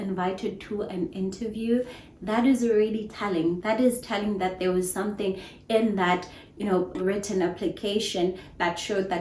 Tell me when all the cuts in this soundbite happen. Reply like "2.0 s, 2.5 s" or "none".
7.0 s